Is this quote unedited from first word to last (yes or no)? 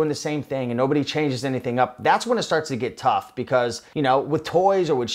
no